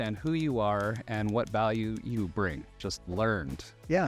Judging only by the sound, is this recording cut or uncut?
cut